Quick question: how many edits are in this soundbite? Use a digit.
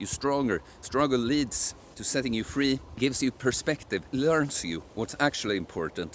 2